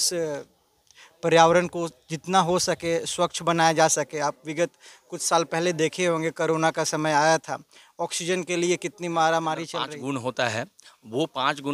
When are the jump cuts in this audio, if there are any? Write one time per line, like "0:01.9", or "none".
0:09.9